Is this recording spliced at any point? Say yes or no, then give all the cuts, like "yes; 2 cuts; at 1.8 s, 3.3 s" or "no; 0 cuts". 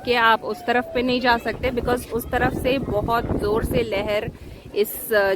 no; 0 cuts